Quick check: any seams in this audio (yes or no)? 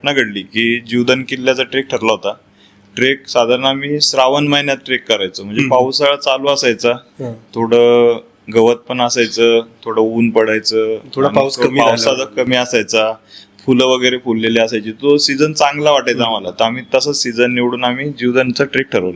no